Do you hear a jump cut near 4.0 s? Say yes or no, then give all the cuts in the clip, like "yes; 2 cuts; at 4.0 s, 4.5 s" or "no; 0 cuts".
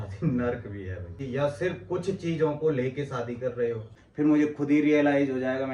yes; 2 cuts; at 1.2 s, 4.0 s